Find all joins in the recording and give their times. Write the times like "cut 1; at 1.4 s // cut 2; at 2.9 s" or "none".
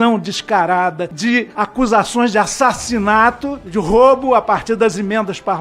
cut 1; at 3.6 s